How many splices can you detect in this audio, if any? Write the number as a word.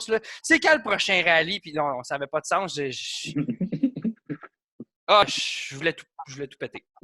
one